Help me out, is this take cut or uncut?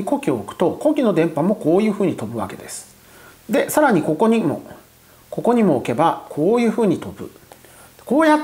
uncut